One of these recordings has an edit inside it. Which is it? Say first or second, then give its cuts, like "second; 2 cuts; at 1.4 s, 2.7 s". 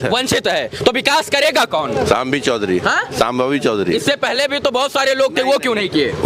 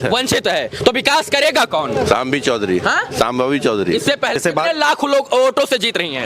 second; 1 cut; at 4.4 s